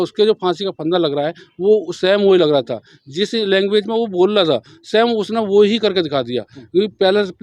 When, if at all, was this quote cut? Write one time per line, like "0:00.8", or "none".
none